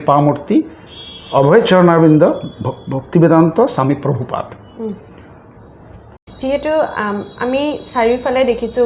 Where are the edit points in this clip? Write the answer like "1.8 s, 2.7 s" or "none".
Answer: 6.2 s